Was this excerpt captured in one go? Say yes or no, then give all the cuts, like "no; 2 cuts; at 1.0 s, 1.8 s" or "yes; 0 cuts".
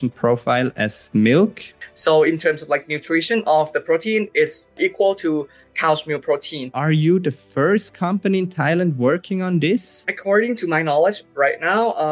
no; 6 cuts; at 1.0 s, 1.7 s, 4.8 s, 6.7 s, 10.1 s, 11.2 s